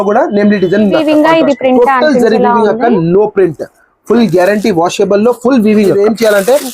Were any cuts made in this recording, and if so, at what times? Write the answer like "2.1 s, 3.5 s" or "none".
1.0 s, 6.0 s